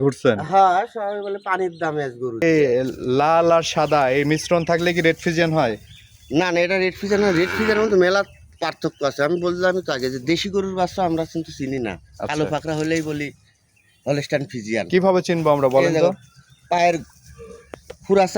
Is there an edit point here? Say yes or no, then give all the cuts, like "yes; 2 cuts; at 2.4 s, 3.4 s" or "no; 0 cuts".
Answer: yes; 1 cut; at 2.4 s